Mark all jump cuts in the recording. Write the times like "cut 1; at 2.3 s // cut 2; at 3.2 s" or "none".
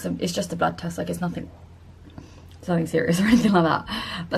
cut 1; at 1.2 s

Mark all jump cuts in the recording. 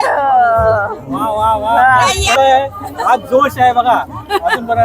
cut 1; at 2.2 s

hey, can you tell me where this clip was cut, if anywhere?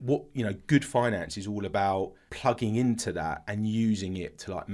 cut 1; at 2.2 s

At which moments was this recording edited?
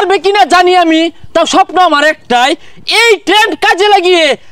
none

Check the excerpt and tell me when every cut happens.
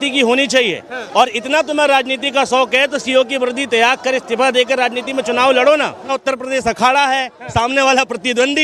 cut 1; at 2.6 s // cut 2; at 6.2 s

